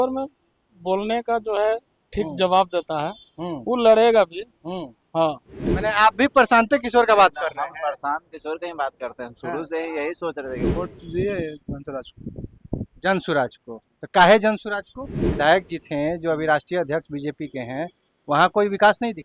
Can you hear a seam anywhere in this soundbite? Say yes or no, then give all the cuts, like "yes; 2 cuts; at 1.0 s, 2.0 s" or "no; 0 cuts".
yes; 3 cuts; at 5.7 s, 10.7 s, 15.2 s